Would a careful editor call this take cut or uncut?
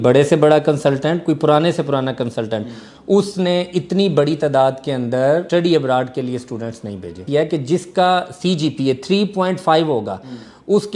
cut